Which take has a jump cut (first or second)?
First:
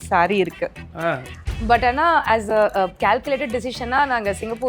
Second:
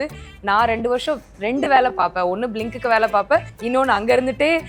first